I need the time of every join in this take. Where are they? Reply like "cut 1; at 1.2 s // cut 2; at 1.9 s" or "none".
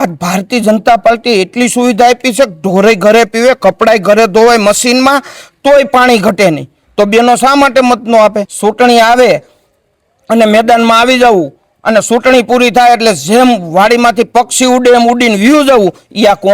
cut 1; at 8.5 s